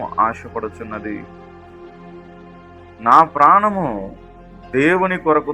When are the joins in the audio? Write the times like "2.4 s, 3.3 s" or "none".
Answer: 1.5 s, 3.0 s